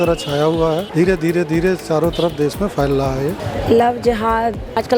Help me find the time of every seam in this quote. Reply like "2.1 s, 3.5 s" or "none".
3.4 s